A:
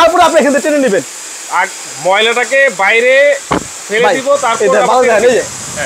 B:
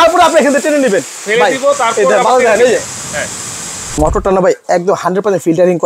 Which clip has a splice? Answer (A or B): B